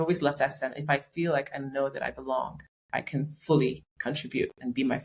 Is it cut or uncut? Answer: uncut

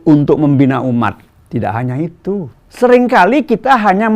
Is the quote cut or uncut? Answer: cut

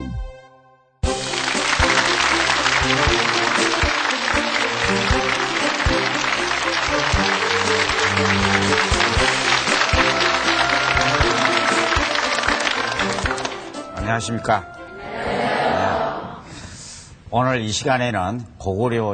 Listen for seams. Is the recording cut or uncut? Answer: cut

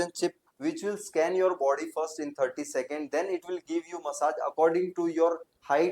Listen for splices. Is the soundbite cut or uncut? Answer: uncut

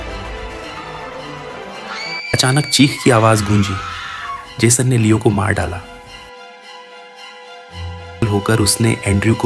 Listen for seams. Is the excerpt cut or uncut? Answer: cut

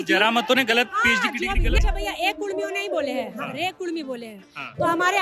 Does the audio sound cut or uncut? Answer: cut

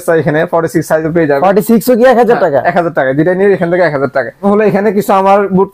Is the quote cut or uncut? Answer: cut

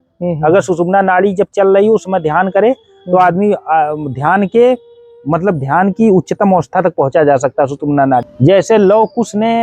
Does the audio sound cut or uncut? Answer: cut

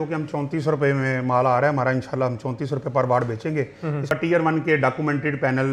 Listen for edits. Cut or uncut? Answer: cut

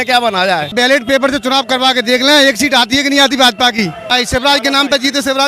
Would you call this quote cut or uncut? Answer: cut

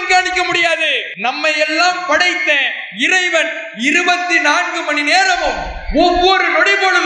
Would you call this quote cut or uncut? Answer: cut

